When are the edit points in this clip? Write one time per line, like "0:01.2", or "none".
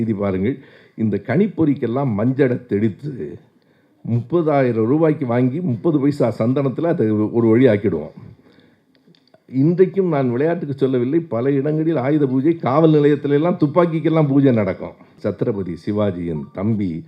0:15.1